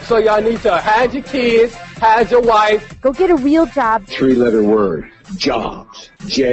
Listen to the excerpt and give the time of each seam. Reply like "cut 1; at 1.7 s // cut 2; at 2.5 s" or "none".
none